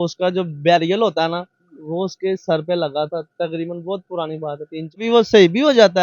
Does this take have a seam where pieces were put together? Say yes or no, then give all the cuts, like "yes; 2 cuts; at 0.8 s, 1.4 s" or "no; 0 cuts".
yes; 1 cut; at 5.0 s